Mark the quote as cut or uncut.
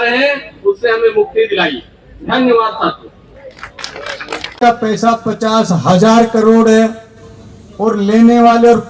cut